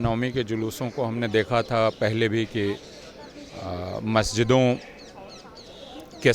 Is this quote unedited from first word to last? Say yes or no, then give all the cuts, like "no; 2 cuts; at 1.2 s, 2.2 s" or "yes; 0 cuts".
yes; 0 cuts